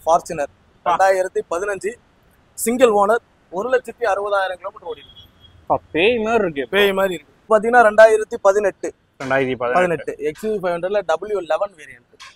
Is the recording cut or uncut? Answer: cut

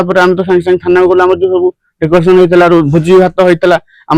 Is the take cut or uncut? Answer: uncut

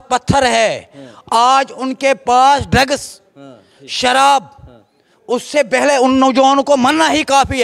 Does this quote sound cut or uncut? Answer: uncut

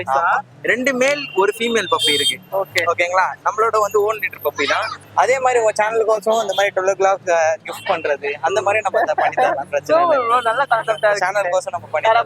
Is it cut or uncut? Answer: cut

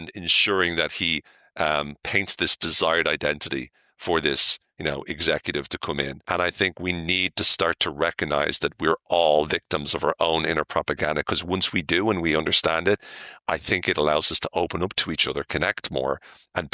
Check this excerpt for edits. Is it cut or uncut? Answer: cut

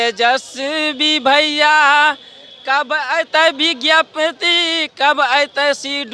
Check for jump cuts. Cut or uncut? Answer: uncut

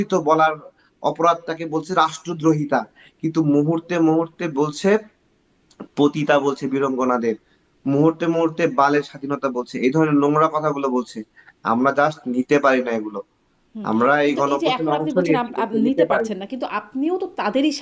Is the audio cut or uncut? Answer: uncut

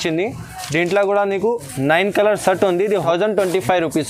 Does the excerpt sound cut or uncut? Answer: uncut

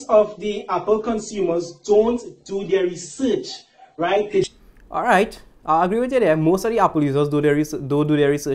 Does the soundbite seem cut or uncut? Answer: uncut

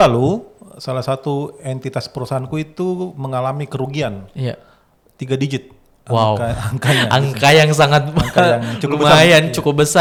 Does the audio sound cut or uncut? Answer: uncut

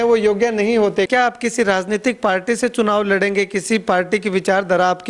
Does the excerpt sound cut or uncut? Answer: cut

